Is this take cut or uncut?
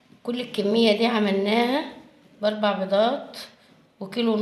uncut